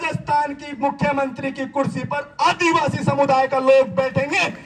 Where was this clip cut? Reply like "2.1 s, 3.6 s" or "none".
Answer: none